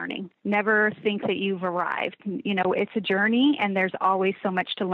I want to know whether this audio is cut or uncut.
uncut